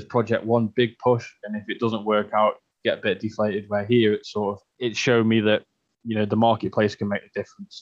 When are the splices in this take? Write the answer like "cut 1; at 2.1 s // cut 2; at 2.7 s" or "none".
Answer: cut 1; at 4.7 s